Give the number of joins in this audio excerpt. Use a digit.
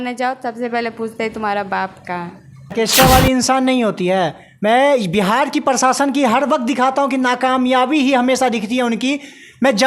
1